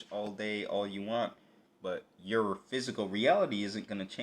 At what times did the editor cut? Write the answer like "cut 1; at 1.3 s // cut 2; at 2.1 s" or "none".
none